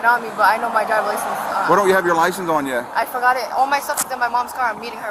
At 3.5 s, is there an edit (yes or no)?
no